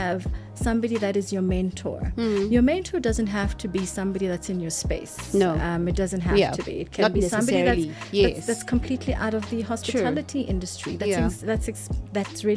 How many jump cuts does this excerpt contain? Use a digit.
0